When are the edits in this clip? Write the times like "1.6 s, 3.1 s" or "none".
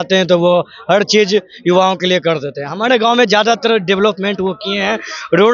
none